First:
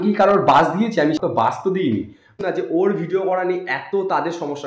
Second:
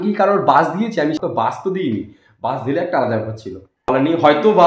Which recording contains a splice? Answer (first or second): first